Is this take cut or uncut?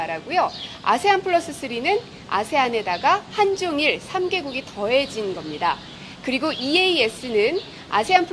uncut